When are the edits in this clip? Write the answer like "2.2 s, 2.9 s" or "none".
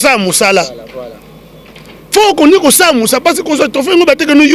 none